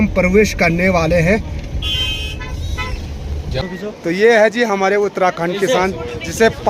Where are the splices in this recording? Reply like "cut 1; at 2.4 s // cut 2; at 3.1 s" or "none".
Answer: cut 1; at 3.6 s